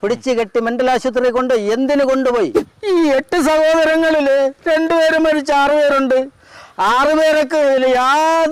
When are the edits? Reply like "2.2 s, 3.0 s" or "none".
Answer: 2.6 s